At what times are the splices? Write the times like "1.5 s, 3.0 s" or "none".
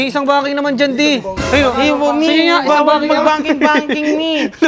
none

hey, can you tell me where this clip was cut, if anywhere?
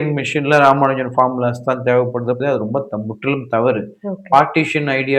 2.4 s

